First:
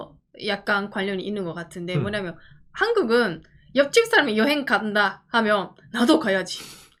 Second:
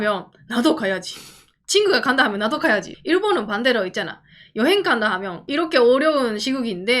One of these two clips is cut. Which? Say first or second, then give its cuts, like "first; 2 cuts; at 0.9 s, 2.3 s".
second; 2 cuts; at 2.9 s, 5.4 s